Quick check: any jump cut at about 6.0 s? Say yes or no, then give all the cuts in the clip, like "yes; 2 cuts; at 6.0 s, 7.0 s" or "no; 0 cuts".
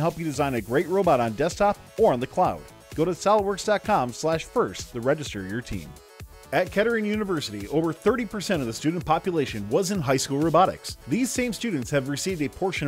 yes; 1 cut; at 6.0 s